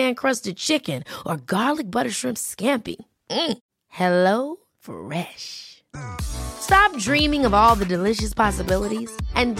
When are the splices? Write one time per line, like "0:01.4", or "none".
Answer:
none

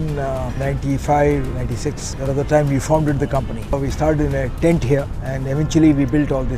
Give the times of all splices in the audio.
0:01.6
0:03.8
0:05.2

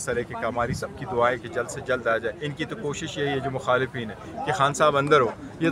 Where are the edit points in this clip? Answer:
0:02.4

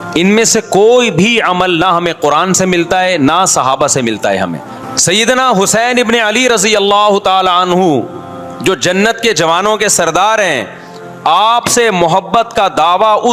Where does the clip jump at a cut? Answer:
0:04.7

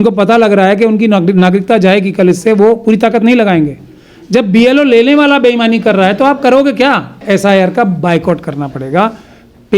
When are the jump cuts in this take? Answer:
0:07.2

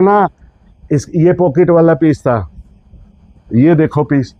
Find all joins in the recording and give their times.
none

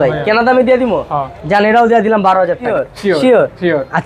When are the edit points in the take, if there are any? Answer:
0:02.8

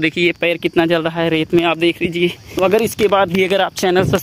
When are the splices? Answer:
0:02.4

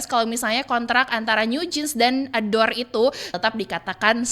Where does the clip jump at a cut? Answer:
0:03.4

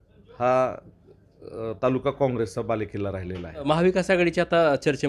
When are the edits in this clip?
0:03.6

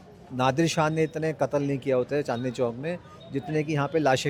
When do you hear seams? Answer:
none

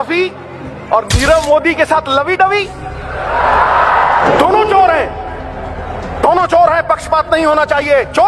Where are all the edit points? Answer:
none

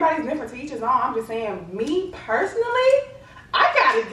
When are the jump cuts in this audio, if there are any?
none

